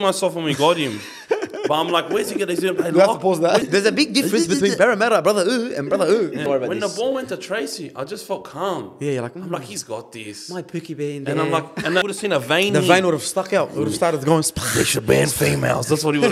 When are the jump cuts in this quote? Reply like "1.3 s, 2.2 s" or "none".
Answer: 3.6 s, 6.4 s, 12.0 s

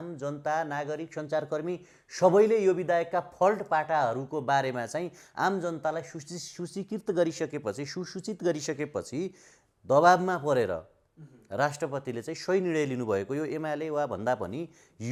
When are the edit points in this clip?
none

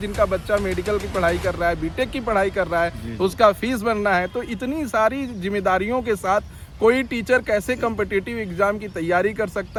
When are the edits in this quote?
none

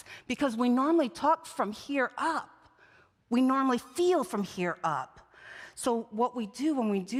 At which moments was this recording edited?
none

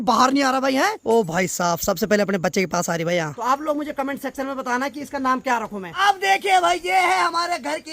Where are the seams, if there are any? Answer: 1.0 s, 3.4 s, 5.9 s

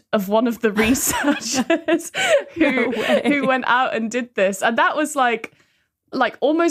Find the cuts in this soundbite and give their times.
none

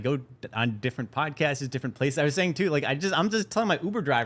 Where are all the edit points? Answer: none

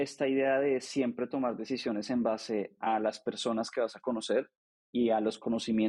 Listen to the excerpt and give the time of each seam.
none

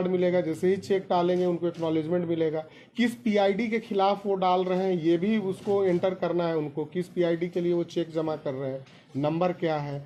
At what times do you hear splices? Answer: none

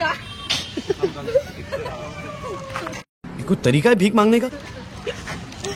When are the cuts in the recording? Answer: none

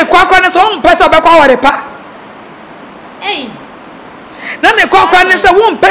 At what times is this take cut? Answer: none

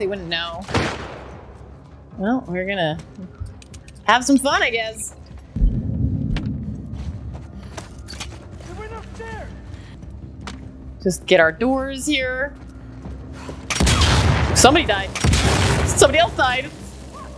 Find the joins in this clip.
5.5 s, 9.9 s

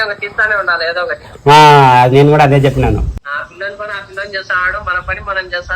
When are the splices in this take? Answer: 3.2 s

